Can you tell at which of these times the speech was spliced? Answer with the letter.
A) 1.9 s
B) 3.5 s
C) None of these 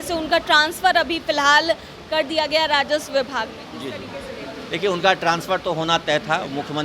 C